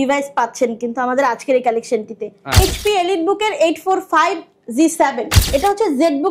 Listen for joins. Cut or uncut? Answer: cut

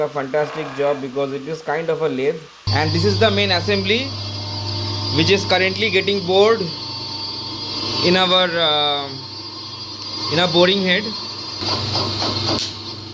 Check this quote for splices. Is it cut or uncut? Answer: cut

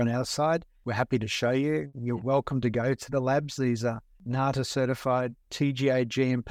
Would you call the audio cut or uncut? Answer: uncut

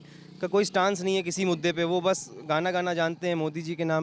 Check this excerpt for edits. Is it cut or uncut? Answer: uncut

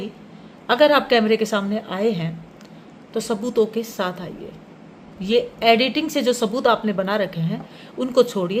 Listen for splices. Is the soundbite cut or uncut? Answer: uncut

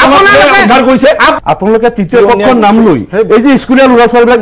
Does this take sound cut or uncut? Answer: cut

